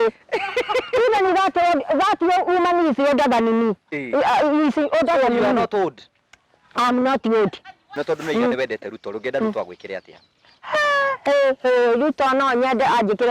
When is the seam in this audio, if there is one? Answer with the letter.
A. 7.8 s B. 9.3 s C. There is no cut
A